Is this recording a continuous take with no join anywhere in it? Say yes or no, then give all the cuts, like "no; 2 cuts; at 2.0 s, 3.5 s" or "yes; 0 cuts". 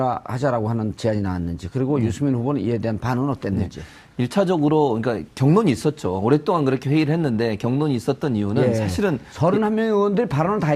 no; 1 cut; at 8.7 s